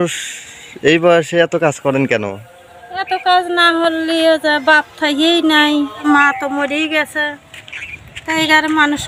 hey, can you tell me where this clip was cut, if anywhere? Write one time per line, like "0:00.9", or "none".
none